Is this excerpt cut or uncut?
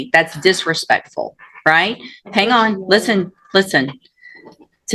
uncut